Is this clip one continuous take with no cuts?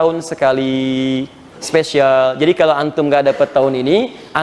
yes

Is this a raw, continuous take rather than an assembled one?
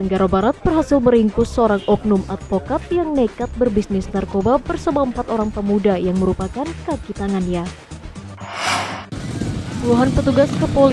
no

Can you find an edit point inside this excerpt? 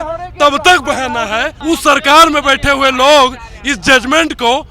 yes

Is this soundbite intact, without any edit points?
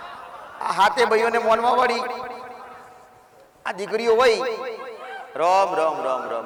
yes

